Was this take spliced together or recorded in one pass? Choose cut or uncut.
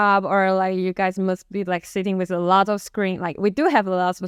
uncut